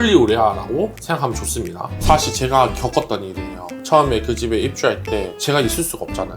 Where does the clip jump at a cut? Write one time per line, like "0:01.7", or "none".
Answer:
0:01.9